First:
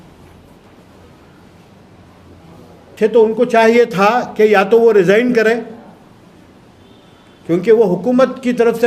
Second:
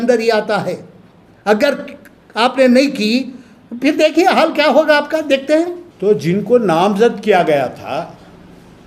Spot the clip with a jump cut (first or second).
second